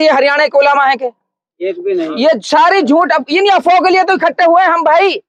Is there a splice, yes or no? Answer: no